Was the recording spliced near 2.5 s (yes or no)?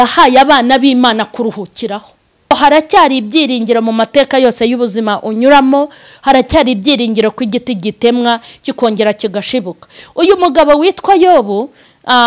yes